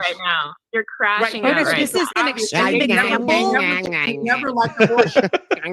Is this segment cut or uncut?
cut